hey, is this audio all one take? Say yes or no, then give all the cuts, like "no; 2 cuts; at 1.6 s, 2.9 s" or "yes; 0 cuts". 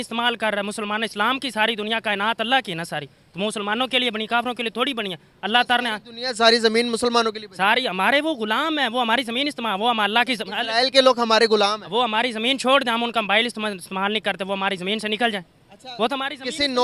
yes; 0 cuts